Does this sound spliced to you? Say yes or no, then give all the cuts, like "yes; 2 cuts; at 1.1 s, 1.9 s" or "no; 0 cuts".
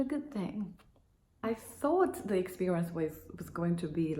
yes; 1 cut; at 1.4 s